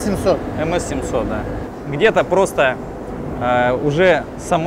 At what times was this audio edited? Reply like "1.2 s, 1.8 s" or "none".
none